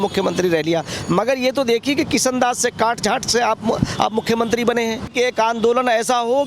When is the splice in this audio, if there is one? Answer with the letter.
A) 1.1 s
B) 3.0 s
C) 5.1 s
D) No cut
C